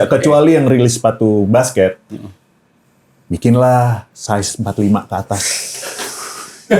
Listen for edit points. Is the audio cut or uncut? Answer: uncut